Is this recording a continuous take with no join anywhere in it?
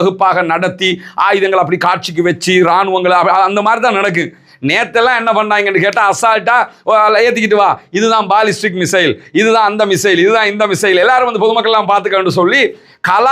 yes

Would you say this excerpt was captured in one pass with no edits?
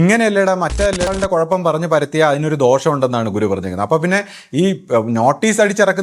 no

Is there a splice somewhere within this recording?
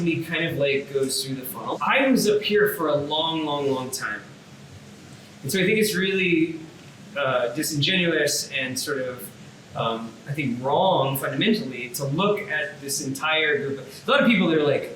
yes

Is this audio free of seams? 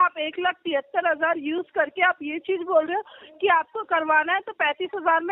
yes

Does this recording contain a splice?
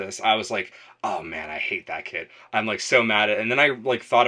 no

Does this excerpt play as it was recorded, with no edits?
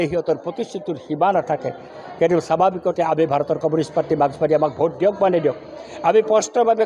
yes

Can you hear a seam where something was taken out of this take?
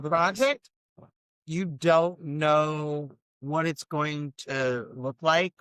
no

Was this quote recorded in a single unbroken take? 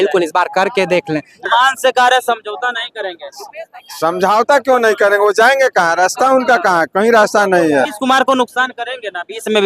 no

